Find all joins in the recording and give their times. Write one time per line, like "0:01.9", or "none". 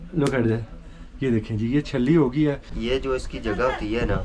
0:02.7